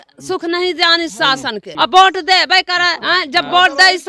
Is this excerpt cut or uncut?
cut